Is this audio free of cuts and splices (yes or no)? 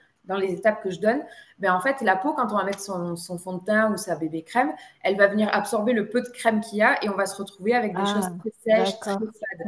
yes